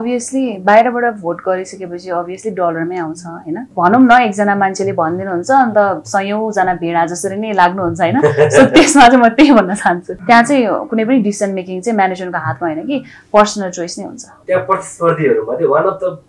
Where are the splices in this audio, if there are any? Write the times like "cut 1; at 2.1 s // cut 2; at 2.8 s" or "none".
cut 1; at 3.7 s // cut 2; at 10.1 s // cut 3; at 14.3 s